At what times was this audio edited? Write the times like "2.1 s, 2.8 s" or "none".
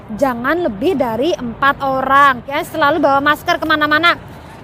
2.6 s

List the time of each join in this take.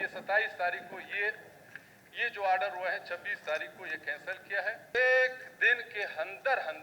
4.9 s

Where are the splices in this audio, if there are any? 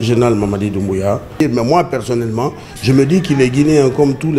1.4 s

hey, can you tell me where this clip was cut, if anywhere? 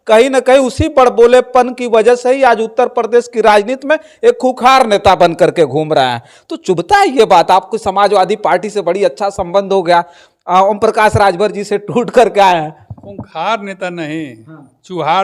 none

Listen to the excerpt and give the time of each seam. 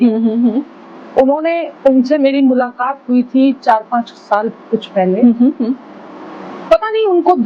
none

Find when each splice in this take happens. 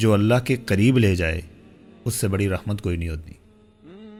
none

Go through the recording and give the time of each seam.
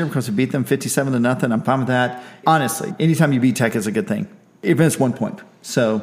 2.4 s, 4.6 s

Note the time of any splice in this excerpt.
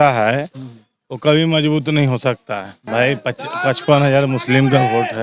2.8 s

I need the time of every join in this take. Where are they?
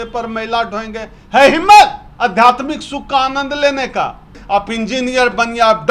4.4 s

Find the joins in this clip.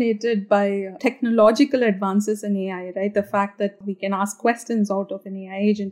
1.0 s, 3.8 s

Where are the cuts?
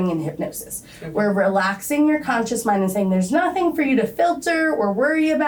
none

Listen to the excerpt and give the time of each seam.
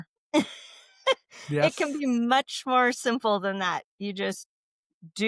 none

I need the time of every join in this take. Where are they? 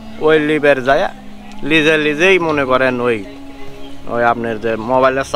none

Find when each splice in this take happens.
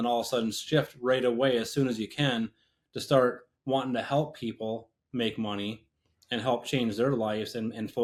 none

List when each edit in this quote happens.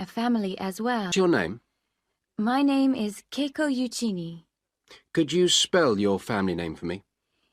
1.1 s

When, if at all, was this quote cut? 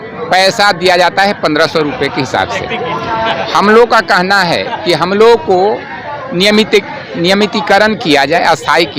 none

